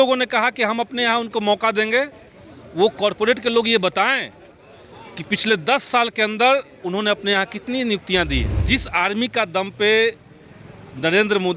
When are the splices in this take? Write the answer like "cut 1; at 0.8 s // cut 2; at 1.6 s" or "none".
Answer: cut 1; at 8.5 s